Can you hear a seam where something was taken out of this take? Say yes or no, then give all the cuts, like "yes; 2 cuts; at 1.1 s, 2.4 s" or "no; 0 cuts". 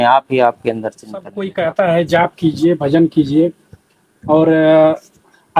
yes; 1 cut; at 1.4 s